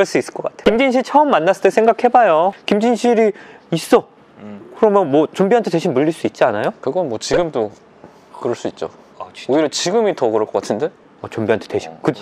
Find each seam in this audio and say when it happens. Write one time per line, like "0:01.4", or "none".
none

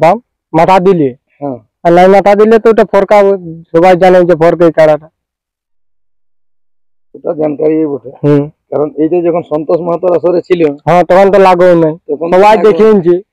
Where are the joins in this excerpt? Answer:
none

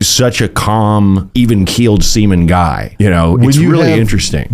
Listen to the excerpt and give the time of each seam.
0:01.3
0:02.8

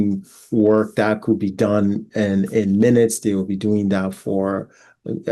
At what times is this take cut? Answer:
none

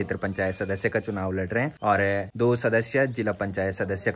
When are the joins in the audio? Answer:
none

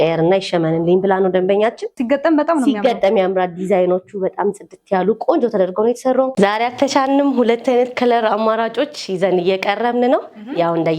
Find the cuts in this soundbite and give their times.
0:02.0
0:06.3

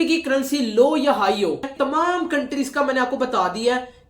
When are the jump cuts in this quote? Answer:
0:01.7

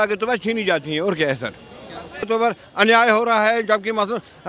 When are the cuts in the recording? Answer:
0:02.3

